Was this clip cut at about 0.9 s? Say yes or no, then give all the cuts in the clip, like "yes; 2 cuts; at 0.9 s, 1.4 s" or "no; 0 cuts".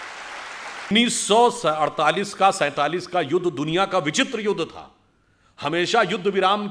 yes; 1 cut; at 0.9 s